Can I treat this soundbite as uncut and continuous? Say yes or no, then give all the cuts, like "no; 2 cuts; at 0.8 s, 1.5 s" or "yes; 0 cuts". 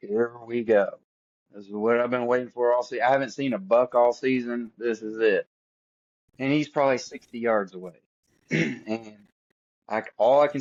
yes; 0 cuts